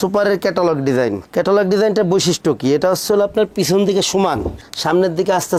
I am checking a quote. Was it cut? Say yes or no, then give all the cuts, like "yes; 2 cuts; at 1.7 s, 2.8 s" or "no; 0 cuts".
no; 0 cuts